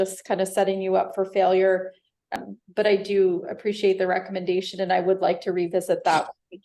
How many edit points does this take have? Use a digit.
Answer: 0